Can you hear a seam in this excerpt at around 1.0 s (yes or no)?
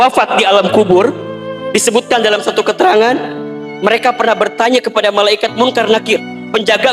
no